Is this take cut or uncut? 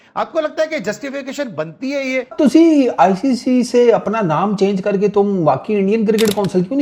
cut